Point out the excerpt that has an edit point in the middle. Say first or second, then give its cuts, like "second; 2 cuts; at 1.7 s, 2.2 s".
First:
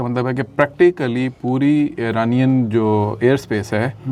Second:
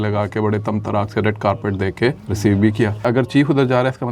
second; 2 cuts; at 2.3 s, 3.0 s